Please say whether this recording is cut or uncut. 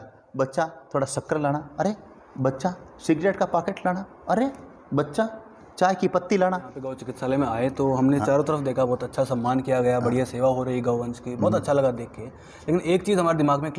cut